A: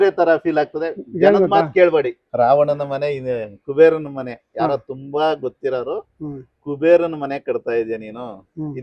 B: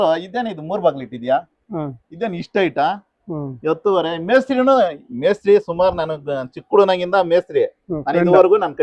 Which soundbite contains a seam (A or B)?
A